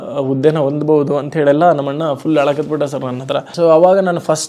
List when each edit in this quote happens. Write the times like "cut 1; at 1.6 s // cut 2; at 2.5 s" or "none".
cut 1; at 3.5 s